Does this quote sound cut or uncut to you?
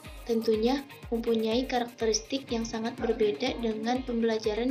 uncut